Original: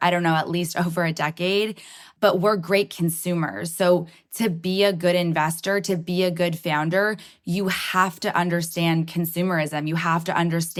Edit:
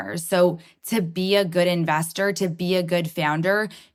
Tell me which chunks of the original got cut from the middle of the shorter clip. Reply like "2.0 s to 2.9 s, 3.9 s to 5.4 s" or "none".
none